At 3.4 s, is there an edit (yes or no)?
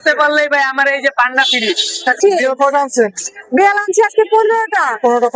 no